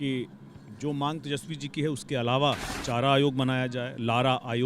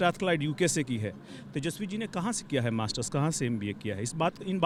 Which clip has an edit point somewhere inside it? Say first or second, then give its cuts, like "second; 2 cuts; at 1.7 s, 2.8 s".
first; 1 cut; at 2.7 s